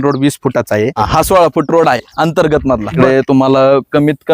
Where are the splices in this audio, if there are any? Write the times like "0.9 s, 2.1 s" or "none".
1.0 s, 2.9 s

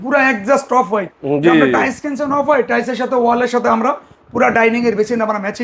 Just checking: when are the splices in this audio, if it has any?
none

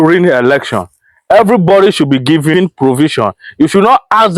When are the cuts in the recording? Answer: 2.5 s

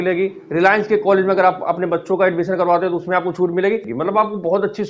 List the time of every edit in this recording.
3.9 s

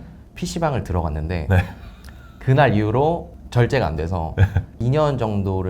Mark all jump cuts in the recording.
3.4 s, 4.7 s

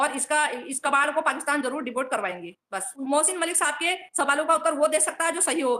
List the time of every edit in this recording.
none

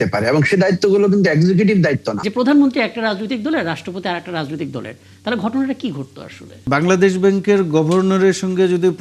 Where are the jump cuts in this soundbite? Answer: 2.2 s, 6.7 s

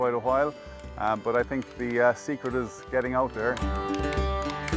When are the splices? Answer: none

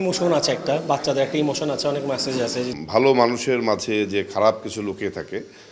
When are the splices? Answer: 2.7 s

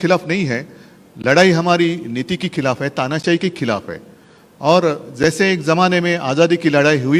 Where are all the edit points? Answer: none

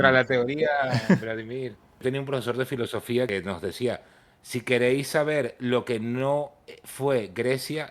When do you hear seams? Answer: 2.0 s, 3.3 s

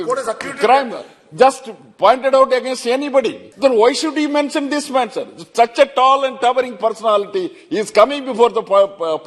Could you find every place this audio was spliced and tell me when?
3.4 s

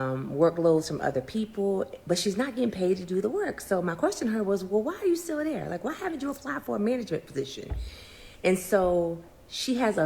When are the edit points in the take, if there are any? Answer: 3.8 s

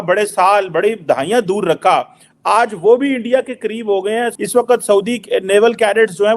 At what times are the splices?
4.3 s

